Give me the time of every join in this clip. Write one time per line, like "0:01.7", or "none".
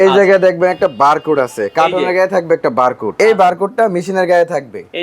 0:03.1